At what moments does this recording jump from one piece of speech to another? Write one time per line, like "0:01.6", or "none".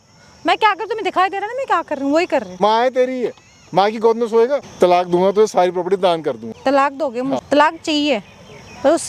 0:02.5
0:04.7
0:06.5
0:07.4